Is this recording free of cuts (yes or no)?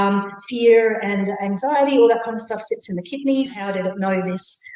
no